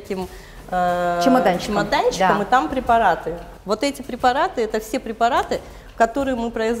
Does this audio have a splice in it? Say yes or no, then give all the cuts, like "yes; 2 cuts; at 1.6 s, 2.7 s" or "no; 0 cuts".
no; 0 cuts